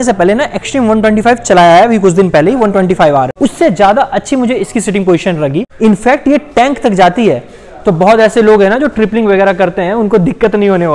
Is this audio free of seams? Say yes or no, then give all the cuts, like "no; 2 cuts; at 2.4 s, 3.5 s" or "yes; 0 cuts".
no; 2 cuts; at 3.3 s, 5.7 s